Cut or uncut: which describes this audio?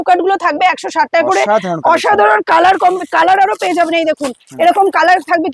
uncut